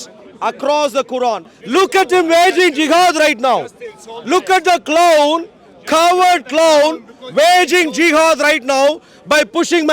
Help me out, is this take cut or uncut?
cut